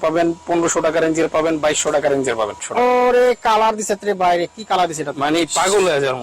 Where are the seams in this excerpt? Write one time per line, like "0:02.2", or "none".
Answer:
0:02.6